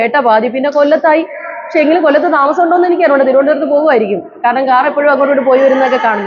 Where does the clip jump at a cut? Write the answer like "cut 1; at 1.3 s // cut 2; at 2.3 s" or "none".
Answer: none

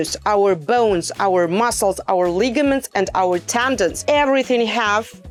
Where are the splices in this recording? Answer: none

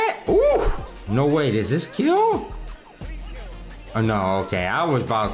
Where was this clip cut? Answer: cut 1; at 1.0 s

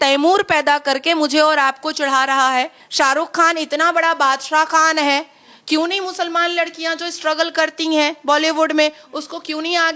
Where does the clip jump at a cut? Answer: cut 1; at 2.8 s

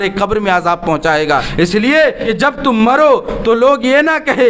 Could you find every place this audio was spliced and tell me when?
cut 1; at 1.5 s // cut 2; at 2.2 s

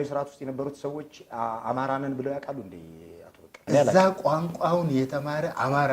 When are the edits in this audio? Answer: cut 1; at 3.6 s

